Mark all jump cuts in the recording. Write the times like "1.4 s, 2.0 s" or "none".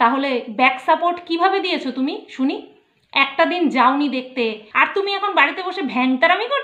4.6 s